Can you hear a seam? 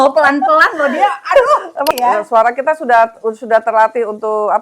yes; 1 cut; at 1.9 s

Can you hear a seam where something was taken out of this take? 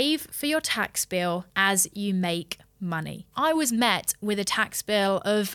yes; 1 cut; at 3.3 s

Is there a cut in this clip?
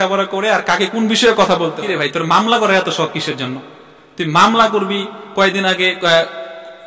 yes; 1 cut; at 1.9 s

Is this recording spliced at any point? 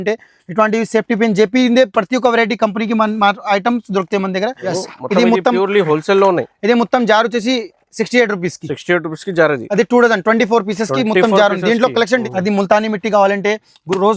yes; 2 cuts; at 4.7 s, 12.2 s

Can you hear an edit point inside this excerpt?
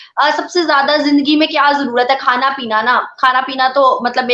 no; 0 cuts

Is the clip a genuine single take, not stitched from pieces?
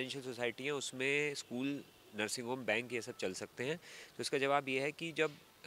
yes; 0 cuts

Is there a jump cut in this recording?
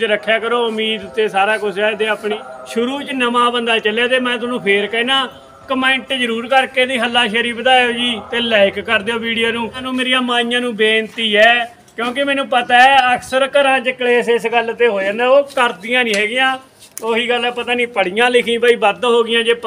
yes; 2 cuts; at 2.4 s, 9.8 s

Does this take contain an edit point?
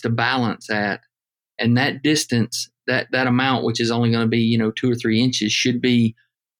no; 0 cuts

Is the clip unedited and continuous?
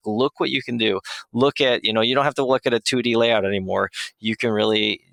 yes; 0 cuts

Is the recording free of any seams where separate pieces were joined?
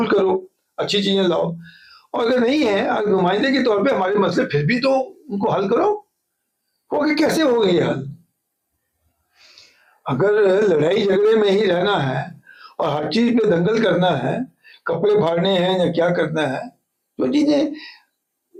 yes; 0 cuts

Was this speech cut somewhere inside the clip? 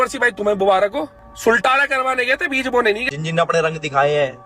yes; 2 cuts; at 1.2 s, 3.0 s

